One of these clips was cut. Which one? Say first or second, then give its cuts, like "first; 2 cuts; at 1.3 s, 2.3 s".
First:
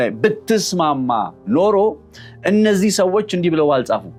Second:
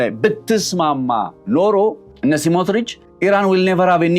second; 2 cuts; at 2.1 s, 3.0 s